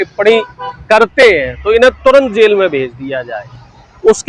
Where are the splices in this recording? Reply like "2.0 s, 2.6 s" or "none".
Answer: none